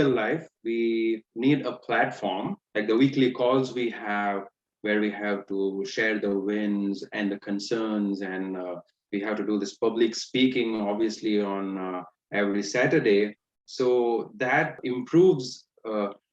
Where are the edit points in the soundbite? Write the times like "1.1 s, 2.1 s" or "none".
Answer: 2.6 s, 14.8 s